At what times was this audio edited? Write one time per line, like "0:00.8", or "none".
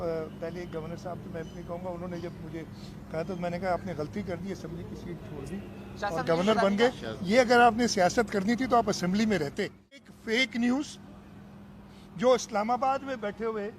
0:10.1